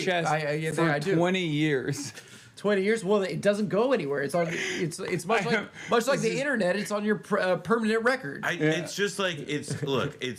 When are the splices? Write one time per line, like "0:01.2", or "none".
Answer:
none